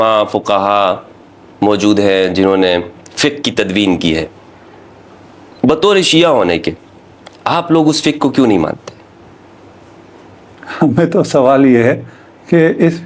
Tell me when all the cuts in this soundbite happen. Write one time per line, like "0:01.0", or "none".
none